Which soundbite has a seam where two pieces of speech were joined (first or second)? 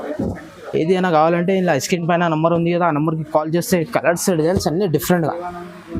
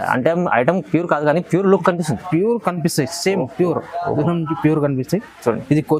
first